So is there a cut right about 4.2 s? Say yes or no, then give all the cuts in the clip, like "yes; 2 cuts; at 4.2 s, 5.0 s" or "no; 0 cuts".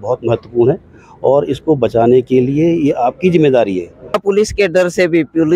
yes; 1 cut; at 4.2 s